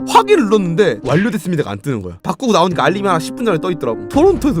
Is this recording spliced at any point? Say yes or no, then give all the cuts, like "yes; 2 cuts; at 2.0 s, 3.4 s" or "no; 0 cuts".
yes; 1 cut; at 2.1 s